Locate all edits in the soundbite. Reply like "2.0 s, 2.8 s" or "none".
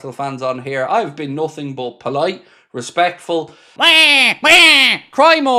3.7 s